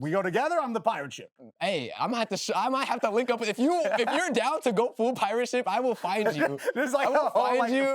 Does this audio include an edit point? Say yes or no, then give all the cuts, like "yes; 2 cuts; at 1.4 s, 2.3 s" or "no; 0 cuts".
no; 0 cuts